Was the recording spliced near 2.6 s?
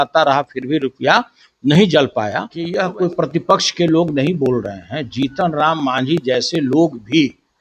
yes; 1 cut; at 2.6 s

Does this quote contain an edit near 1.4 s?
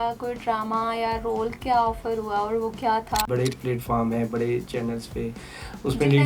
no; 1 cut; at 3.2 s

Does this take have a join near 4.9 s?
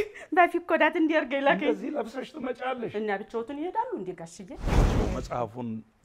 yes; 1 cut; at 4.9 s

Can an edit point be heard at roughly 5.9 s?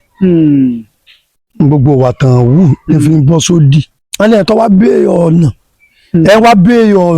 no; 1 cut; at 4.0 s

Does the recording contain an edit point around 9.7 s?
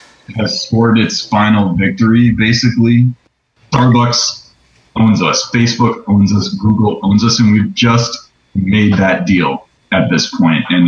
yes; 2 cuts; at 3.3 s, 9.7 s

